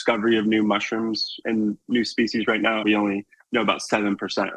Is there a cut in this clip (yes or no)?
yes